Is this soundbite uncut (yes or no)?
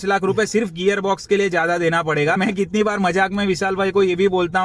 no